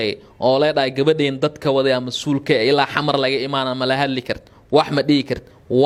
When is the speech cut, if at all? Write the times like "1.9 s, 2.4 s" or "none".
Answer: none